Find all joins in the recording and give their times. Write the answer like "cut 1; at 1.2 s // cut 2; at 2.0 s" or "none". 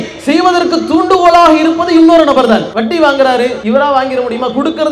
cut 1; at 2.7 s // cut 2; at 3.6 s